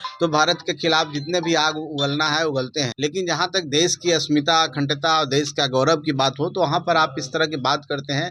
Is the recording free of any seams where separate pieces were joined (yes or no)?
no